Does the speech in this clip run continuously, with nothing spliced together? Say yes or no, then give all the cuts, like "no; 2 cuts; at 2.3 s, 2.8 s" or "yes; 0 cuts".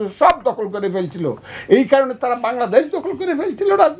yes; 0 cuts